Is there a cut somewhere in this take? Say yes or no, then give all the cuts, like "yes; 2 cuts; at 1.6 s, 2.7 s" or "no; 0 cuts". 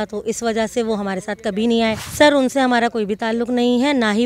yes; 1 cut; at 2.1 s